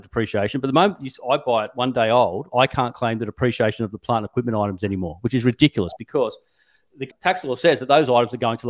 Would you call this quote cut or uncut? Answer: uncut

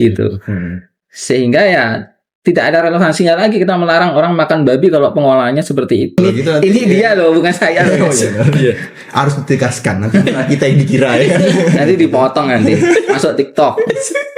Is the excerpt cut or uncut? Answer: cut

